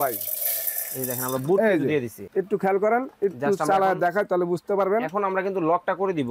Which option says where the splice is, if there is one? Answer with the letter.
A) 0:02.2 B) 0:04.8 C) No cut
A